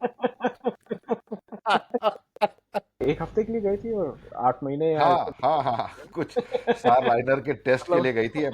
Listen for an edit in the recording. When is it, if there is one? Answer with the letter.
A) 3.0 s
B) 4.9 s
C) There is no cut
A